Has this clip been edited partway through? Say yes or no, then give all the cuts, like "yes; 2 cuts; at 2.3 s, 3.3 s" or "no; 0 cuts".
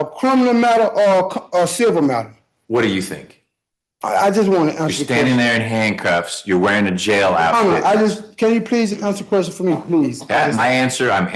no; 0 cuts